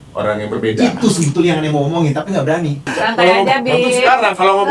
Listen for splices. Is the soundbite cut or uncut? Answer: cut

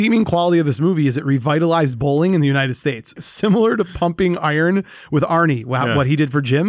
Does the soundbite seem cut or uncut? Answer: cut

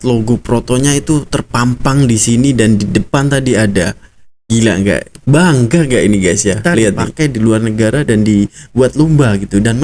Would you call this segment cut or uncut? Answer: cut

